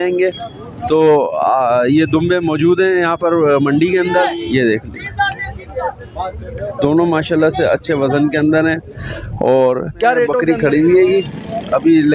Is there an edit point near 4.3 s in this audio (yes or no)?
yes